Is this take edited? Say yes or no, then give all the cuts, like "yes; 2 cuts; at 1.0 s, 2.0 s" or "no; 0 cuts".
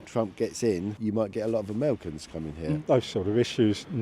yes; 2 cuts; at 1.0 s, 2.8 s